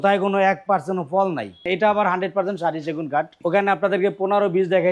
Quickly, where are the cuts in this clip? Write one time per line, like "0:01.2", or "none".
0:01.6
0:03.3